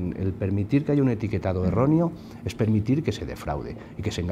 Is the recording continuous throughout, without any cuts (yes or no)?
yes